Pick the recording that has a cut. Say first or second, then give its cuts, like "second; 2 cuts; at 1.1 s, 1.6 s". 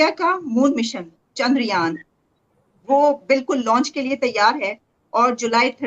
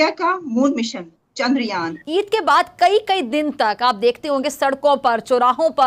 second; 1 cut; at 1.9 s